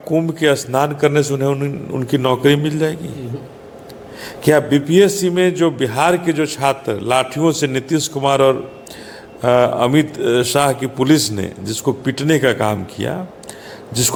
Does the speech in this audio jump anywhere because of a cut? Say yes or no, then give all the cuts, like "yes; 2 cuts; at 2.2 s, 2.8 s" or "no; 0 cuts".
no; 0 cuts